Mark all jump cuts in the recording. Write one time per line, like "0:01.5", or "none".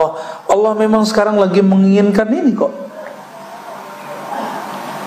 none